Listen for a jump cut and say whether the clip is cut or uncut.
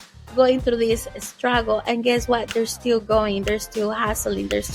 uncut